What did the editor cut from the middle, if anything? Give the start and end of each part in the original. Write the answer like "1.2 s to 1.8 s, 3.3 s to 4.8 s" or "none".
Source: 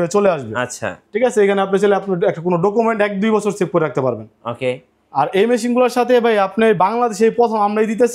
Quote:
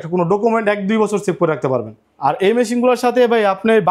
4.3 s to 4.9 s